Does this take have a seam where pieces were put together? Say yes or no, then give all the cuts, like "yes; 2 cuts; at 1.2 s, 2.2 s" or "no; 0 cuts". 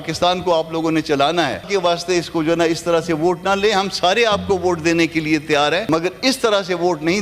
yes; 2 cuts; at 1.7 s, 5.8 s